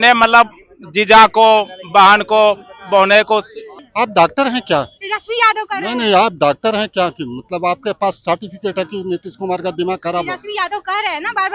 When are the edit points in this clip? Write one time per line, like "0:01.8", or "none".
0:03.8